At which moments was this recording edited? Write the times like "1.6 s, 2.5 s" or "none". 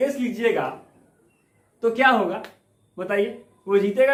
none